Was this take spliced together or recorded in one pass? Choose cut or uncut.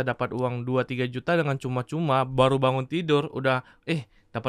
uncut